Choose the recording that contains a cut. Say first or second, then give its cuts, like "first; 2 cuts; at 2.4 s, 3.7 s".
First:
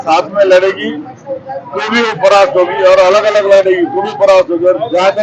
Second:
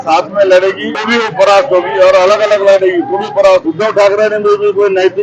second; 2 cuts; at 0.9 s, 3.7 s